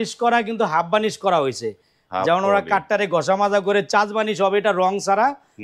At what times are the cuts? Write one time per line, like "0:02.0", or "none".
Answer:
none